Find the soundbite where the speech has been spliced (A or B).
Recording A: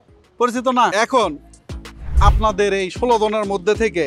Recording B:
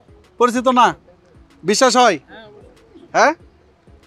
A